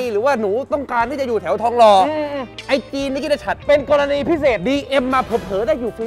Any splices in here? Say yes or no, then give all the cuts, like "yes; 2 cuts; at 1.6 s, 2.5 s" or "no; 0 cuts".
no; 0 cuts